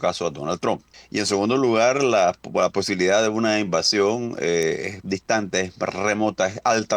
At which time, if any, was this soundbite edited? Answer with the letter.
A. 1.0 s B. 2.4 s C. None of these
A